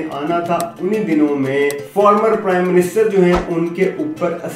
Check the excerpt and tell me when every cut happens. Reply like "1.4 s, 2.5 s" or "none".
1.8 s